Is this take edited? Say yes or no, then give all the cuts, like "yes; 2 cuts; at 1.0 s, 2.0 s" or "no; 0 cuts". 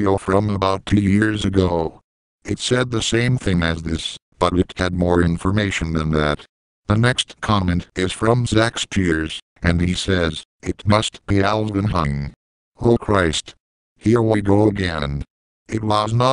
yes; 1 cut; at 12.6 s